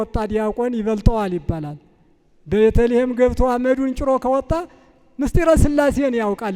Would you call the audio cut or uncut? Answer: uncut